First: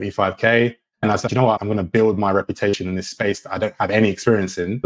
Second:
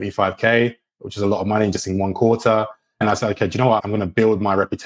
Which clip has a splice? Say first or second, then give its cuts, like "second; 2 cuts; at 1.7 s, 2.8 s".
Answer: first; 1 cut; at 1.2 s